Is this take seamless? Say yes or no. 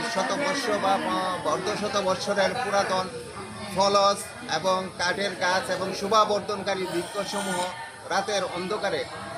yes